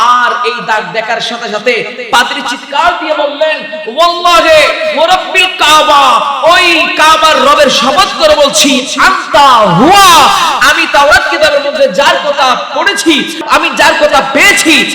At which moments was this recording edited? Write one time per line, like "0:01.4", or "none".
0:13.4